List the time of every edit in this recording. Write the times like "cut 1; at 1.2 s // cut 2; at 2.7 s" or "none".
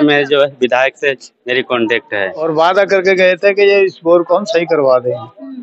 cut 1; at 2.4 s